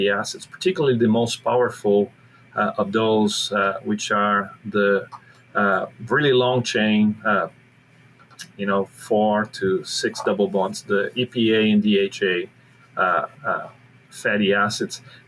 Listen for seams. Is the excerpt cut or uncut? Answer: uncut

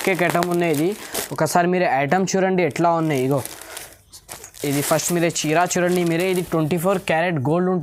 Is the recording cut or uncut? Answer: uncut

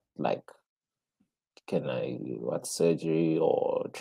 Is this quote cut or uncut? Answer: uncut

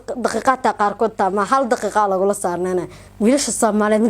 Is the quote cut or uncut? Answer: cut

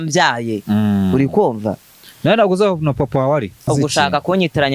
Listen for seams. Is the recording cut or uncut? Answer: cut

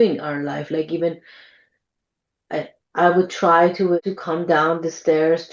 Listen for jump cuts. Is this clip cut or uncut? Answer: cut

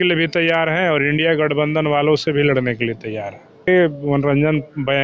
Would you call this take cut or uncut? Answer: cut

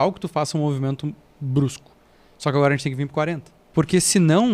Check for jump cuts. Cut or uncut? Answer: cut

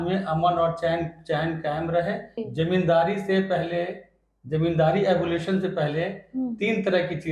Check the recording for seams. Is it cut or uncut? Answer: cut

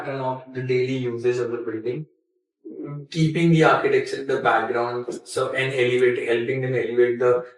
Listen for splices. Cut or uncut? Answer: uncut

